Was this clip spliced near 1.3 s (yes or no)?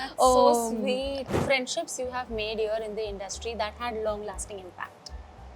yes